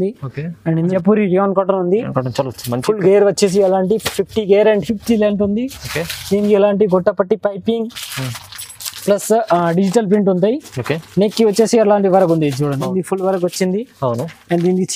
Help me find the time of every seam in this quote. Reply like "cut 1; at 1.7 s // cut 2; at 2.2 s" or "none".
cut 1; at 0.9 s // cut 2; at 12.9 s